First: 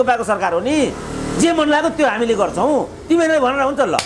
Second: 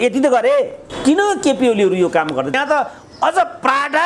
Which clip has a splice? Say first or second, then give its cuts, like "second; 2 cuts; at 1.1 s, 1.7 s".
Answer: second; 2 cuts; at 0.9 s, 2.5 s